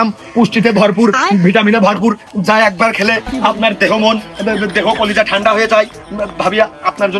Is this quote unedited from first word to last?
yes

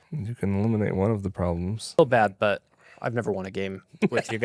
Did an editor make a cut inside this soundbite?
yes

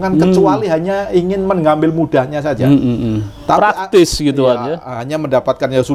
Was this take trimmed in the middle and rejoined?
no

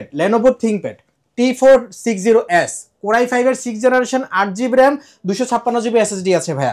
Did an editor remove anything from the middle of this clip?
no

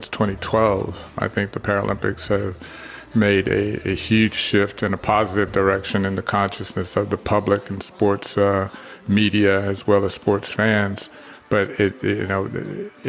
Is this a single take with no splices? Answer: no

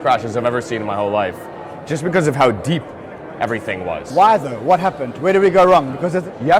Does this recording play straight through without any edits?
yes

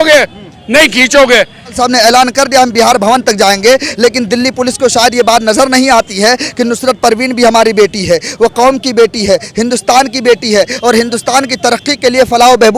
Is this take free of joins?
no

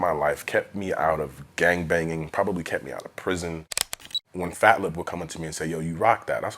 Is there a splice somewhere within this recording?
yes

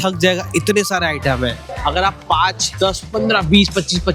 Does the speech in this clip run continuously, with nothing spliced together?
no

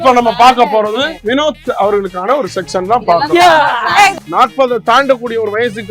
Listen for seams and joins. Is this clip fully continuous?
no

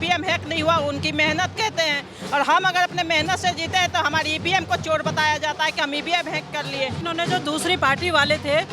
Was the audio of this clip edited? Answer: yes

